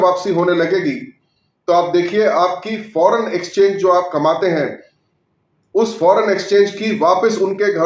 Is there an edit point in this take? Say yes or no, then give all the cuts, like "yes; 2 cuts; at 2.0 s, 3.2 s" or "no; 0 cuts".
no; 0 cuts